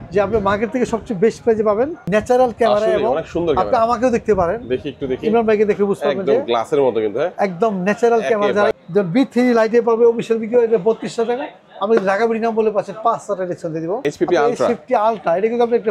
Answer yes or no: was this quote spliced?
yes